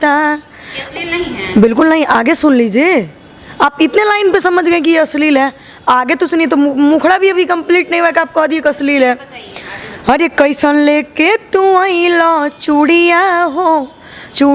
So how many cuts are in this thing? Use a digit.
0